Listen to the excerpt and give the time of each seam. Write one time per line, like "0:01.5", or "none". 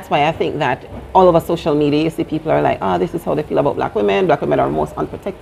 0:00.9